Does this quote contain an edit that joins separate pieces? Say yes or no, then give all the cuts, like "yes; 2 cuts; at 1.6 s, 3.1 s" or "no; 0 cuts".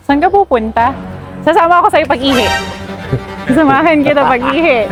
no; 0 cuts